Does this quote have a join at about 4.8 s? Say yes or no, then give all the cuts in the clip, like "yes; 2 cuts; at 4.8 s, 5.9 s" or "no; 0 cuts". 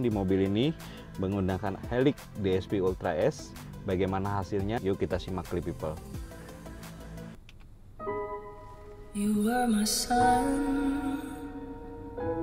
yes; 2 cuts; at 4.8 s, 7.4 s